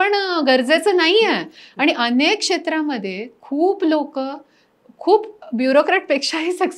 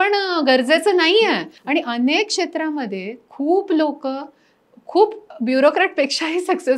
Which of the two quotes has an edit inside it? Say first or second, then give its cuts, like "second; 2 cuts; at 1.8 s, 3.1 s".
second; 1 cut; at 1.5 s